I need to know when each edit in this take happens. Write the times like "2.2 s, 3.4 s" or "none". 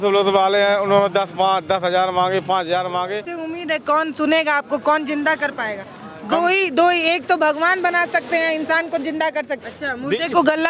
3.3 s, 9.5 s